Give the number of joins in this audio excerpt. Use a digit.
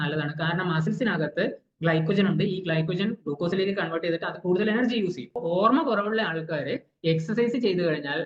1